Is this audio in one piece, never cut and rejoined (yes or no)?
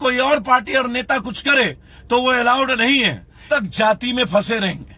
no